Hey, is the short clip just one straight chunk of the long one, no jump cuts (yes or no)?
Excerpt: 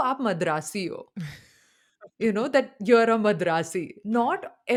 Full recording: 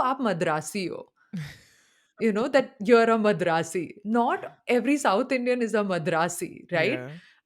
yes